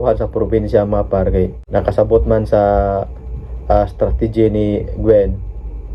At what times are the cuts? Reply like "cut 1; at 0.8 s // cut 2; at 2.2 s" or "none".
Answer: cut 1; at 1.6 s